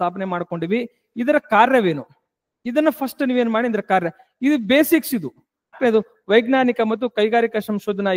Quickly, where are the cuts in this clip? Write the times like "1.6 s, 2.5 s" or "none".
5.8 s